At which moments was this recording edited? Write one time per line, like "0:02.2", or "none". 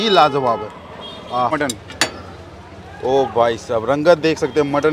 0:01.5